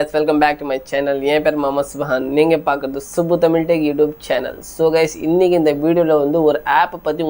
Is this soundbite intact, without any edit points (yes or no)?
yes